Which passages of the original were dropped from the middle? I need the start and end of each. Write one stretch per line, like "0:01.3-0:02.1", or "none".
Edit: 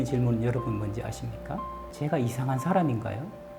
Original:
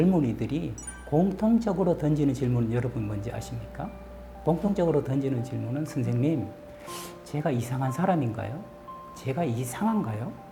0:04.1-0:07.1